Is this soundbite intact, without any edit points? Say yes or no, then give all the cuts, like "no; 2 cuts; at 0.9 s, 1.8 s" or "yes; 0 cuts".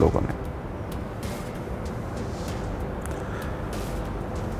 yes; 0 cuts